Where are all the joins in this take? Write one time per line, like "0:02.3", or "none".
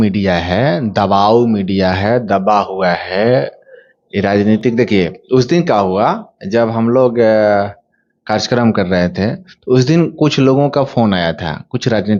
none